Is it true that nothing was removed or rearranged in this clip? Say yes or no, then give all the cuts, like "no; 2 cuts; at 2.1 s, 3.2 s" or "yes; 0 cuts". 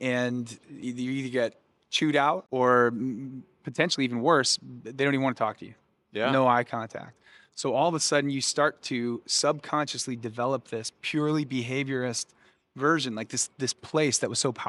no; 1 cut; at 2.4 s